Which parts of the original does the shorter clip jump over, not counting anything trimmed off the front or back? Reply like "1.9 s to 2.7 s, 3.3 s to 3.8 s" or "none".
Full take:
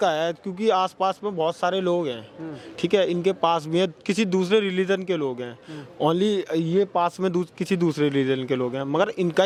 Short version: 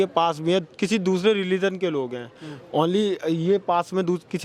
none